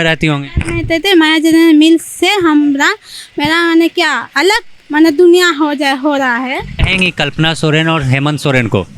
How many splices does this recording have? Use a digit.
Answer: 1